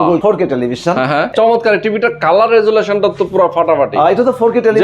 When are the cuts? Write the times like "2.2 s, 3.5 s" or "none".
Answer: 1.3 s